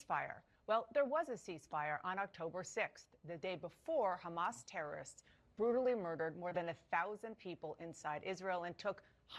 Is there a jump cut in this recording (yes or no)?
no